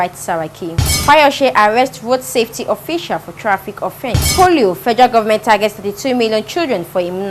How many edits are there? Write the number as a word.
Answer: two